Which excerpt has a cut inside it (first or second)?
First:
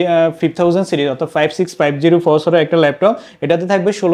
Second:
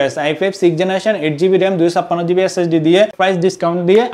second